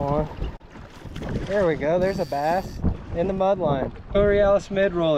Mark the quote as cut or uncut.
cut